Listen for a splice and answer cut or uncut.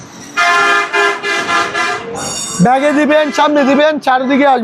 uncut